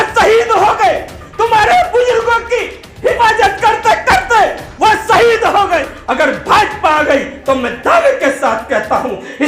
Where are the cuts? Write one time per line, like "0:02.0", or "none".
0:06.0

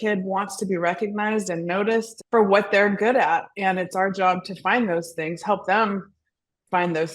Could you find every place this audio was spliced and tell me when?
0:02.1

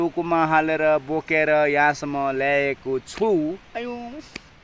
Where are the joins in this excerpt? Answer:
none

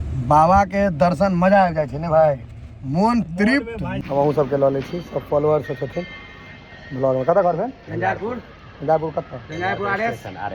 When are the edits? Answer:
0:04.0

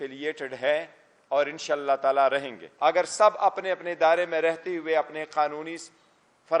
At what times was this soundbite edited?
0:02.6

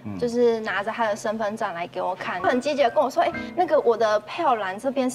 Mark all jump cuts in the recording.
0:02.4

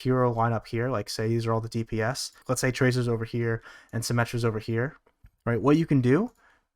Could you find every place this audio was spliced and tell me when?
0:02.3

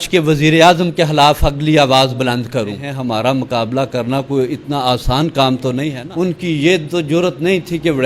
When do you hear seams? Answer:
0:02.9
0:05.9

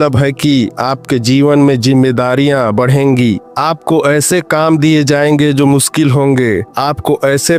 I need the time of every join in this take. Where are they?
none

